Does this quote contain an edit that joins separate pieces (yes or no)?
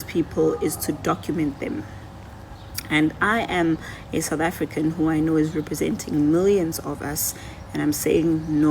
no